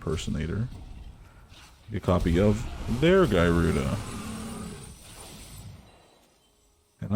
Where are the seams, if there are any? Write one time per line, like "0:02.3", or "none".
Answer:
none